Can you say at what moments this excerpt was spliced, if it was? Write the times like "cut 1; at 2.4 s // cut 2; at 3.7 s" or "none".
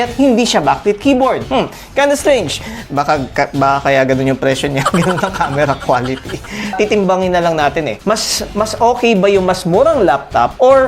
cut 1; at 2.8 s // cut 2; at 6.7 s